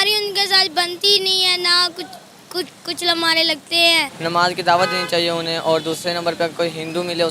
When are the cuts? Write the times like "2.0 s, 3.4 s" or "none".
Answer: 4.1 s